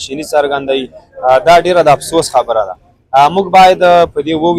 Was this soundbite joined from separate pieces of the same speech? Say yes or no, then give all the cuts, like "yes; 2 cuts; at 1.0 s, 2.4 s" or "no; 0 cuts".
no; 0 cuts